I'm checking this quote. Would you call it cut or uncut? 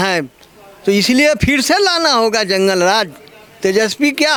uncut